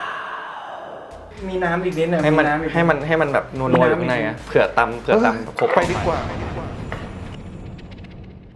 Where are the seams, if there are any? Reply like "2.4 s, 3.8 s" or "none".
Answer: 1.3 s